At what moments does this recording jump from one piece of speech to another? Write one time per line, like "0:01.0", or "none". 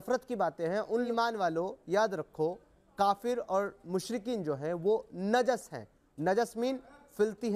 0:01.1